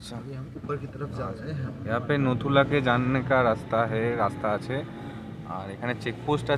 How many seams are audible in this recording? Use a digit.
0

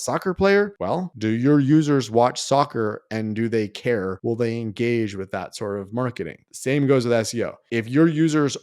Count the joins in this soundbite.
1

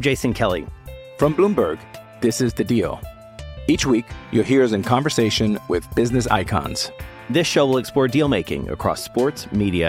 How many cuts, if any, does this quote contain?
0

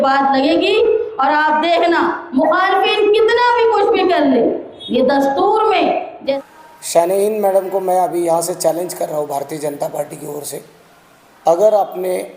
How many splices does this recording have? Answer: 1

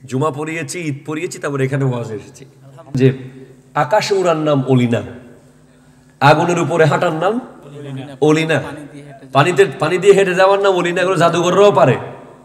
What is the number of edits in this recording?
1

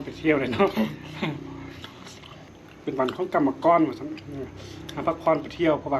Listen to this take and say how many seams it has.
1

